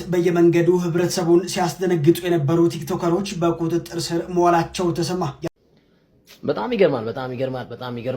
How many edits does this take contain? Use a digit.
1